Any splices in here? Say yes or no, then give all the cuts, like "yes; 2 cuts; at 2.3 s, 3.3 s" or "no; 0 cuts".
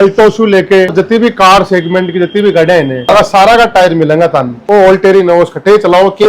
yes; 3 cuts; at 0.9 s, 3.1 s, 4.5 s